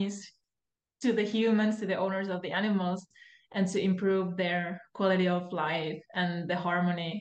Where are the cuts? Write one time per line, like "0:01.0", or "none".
none

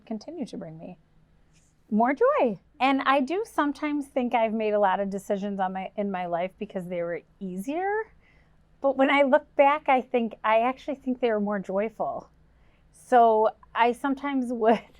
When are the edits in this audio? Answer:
0:02.7

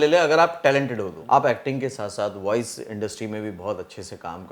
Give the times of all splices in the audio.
0:01.1

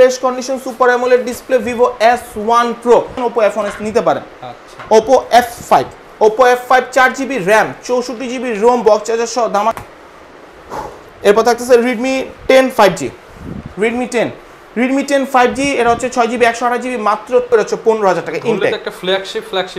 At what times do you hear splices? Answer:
0:03.1
0:09.8
0:17.5

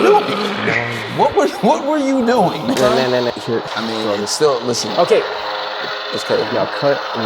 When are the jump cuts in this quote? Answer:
0:02.8

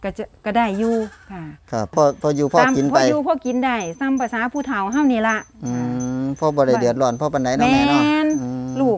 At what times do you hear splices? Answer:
0:01.9

